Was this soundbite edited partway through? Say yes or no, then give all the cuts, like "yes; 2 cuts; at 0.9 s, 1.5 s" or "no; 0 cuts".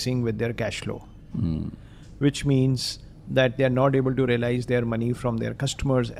no; 0 cuts